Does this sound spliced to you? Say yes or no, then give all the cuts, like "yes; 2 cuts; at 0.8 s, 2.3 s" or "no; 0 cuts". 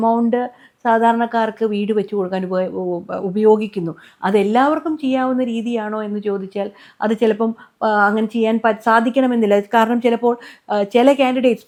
no; 0 cuts